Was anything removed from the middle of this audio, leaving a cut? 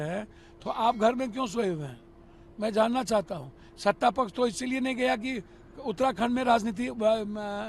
no; 0 cuts

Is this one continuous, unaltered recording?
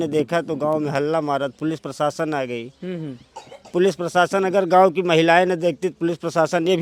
yes; 0 cuts

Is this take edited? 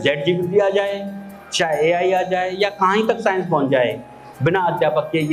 no; 0 cuts

